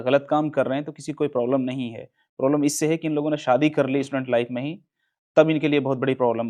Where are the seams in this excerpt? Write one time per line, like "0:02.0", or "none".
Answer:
none